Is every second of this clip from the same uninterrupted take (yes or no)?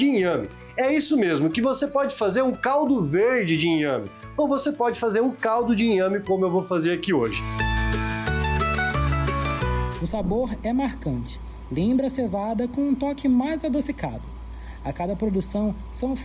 no